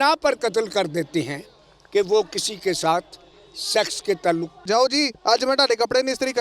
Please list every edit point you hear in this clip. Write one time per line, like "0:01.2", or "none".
0:04.7